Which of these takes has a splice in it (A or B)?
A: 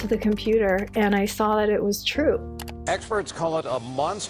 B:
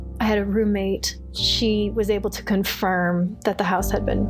A